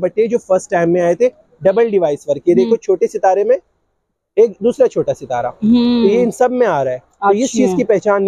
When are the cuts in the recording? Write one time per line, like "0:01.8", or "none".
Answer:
none